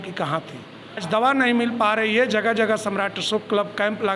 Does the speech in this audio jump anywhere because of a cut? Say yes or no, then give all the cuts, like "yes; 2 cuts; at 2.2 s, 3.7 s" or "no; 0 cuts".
yes; 1 cut; at 1.0 s